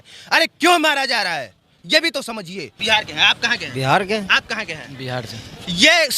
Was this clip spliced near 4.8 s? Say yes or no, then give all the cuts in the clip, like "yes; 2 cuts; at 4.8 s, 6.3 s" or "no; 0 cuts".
no; 1 cut; at 2.7 s